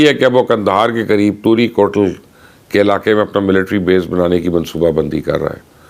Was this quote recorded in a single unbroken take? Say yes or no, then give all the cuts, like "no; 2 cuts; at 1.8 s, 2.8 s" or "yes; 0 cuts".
yes; 0 cuts